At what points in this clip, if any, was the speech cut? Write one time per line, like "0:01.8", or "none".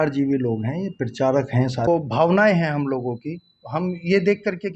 0:01.9